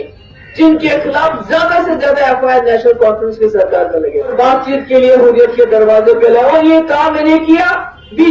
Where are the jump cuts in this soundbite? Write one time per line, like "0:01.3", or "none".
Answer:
0:04.3